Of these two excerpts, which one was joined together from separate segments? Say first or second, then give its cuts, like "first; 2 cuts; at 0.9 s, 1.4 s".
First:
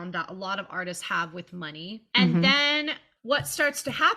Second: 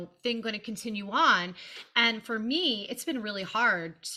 first; 1 cut; at 3.1 s